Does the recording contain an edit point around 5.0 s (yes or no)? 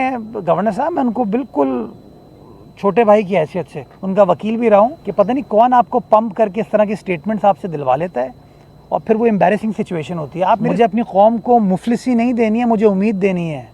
yes